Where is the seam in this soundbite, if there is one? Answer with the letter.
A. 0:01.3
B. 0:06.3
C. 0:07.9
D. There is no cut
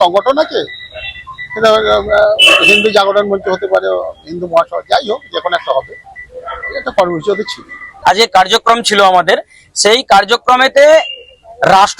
C